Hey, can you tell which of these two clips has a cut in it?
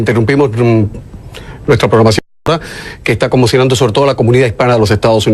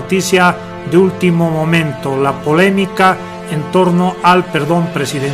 second; 1 cut; at 1.4 s

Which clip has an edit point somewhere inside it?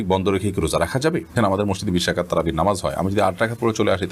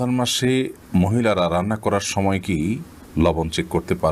first; 1 cut; at 1.4 s

